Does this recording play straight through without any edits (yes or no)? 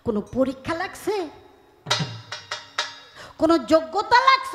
yes